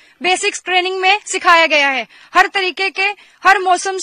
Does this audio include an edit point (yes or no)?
no